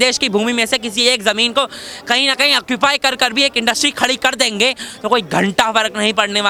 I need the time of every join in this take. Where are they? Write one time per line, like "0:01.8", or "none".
none